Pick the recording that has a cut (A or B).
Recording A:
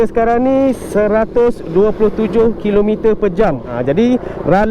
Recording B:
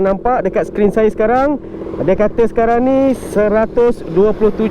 A